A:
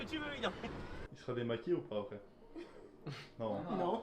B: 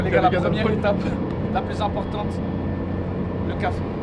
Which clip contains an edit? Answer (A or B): A